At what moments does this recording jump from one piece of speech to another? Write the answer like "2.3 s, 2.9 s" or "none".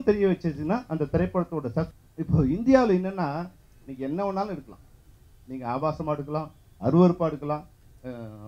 1.9 s